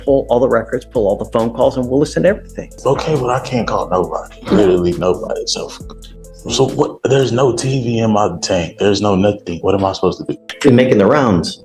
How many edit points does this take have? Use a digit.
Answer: 2